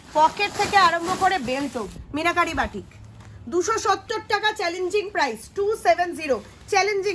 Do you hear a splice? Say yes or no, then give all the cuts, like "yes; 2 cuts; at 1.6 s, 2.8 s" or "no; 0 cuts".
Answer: yes; 1 cut; at 2.0 s